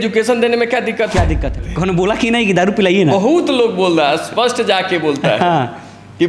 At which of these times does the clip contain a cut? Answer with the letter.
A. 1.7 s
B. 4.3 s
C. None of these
A